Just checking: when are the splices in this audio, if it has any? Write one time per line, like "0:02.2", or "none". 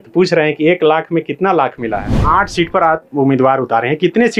0:02.1